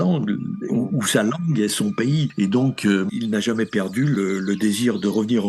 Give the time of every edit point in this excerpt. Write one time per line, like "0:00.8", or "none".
0:03.1
0:04.1